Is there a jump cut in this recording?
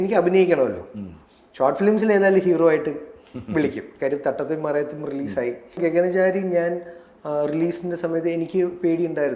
yes; 1 cut; at 5.8 s

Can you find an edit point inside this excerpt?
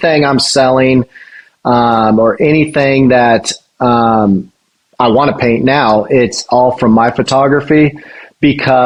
no; 0 cuts

